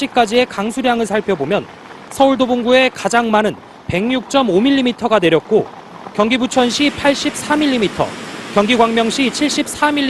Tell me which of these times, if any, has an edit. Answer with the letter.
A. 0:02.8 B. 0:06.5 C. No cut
B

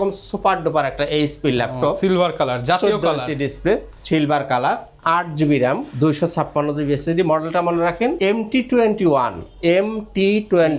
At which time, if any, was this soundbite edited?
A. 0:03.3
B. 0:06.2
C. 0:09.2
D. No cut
D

